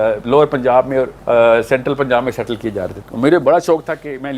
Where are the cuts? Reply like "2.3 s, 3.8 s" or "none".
1.2 s, 3.0 s